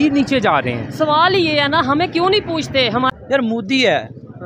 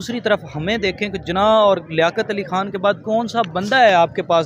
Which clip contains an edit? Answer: first; 1 cut; at 3.1 s

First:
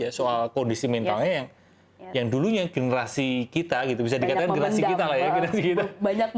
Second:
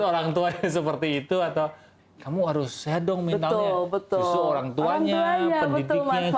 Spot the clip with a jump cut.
second; 1 cut; at 1.9 s

